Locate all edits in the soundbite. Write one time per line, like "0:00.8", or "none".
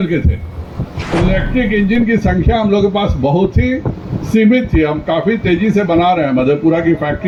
none